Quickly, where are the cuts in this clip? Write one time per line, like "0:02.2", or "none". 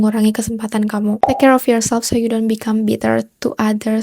0:01.1